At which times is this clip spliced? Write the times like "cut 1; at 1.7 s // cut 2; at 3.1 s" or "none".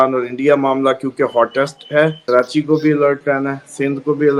cut 1; at 2.2 s